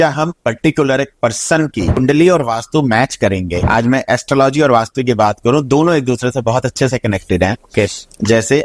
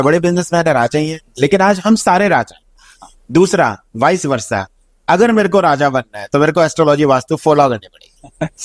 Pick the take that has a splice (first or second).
first